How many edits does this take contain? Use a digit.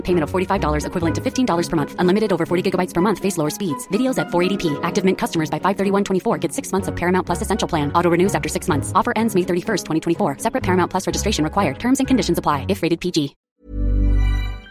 1